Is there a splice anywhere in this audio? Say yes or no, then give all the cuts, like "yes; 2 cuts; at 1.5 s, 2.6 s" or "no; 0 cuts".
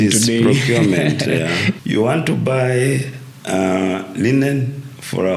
yes; 1 cut; at 1.8 s